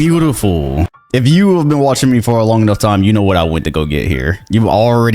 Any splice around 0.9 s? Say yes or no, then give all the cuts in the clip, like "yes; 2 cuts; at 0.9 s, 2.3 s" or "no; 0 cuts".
yes; 1 cut; at 0.9 s